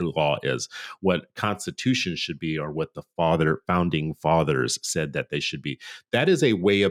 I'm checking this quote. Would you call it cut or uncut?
uncut